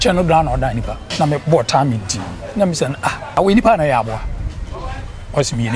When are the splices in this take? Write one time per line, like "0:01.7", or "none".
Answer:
0:01.0
0:03.4